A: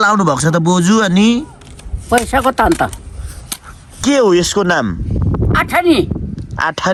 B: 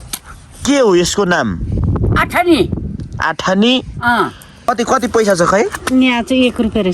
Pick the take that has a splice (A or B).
B